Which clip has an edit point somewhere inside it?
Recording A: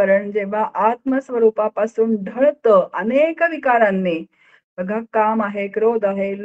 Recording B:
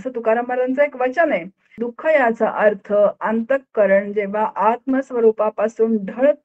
B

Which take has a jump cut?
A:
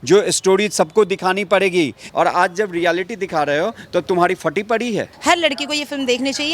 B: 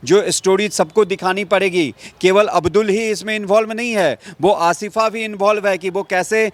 A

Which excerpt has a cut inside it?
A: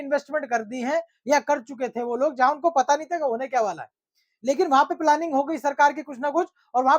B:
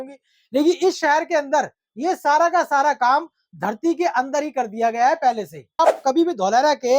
B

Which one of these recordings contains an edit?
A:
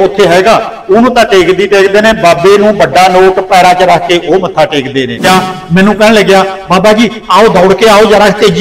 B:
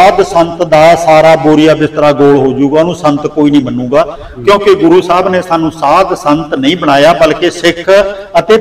A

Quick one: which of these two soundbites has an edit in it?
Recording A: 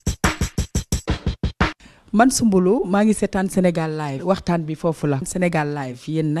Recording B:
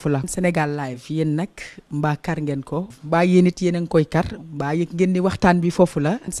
A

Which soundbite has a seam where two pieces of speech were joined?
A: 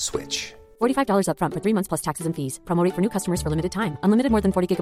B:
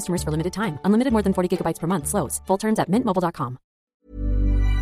B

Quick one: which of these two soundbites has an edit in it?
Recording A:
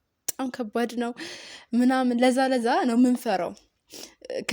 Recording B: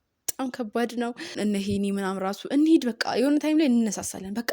B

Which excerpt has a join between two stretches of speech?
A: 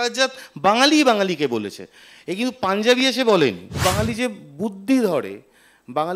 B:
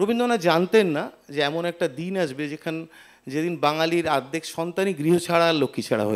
A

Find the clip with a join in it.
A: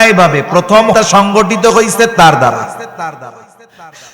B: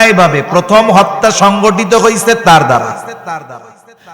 A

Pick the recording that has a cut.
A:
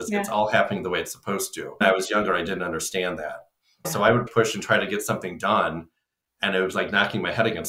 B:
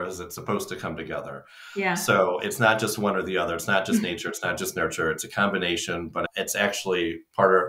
A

